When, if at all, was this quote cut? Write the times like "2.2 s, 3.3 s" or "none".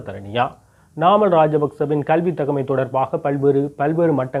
none